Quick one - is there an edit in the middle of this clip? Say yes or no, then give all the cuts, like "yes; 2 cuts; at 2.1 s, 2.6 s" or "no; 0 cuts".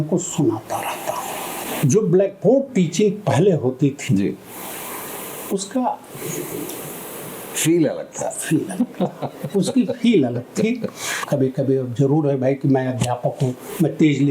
yes; 2 cuts; at 1.6 s, 11.2 s